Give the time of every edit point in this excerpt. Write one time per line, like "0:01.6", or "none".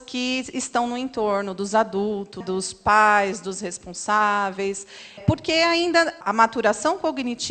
0:02.4
0:05.2
0:06.2